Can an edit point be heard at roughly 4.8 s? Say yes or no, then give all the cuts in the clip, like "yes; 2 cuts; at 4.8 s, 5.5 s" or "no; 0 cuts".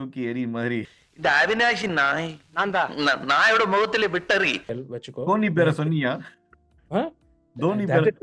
yes; 1 cut; at 4.8 s